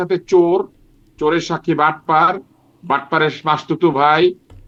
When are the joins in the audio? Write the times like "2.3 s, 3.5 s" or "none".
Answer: none